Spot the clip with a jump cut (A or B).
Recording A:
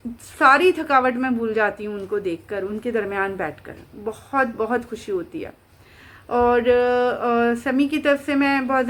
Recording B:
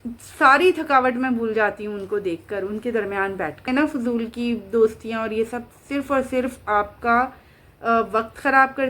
B